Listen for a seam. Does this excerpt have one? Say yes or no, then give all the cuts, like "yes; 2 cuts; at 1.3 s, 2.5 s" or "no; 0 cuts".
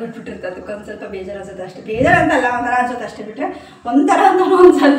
no; 0 cuts